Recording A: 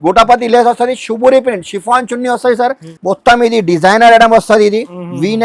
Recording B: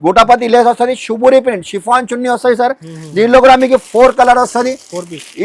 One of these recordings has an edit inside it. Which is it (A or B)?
A